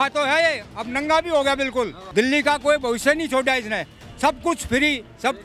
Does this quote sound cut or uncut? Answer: cut